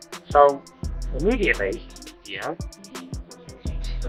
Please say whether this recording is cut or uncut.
uncut